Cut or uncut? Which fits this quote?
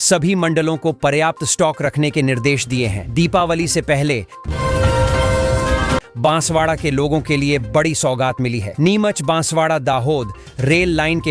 cut